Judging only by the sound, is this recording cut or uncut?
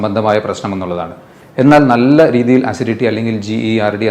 uncut